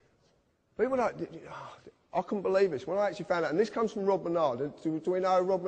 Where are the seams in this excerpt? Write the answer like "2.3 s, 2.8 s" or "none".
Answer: none